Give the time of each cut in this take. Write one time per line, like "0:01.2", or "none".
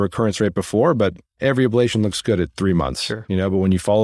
0:01.3